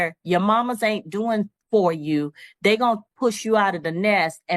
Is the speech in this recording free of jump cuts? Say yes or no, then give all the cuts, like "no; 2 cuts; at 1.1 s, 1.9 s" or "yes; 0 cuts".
yes; 0 cuts